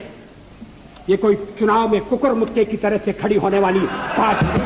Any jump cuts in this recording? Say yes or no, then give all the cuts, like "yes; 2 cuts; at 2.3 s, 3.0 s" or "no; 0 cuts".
no; 0 cuts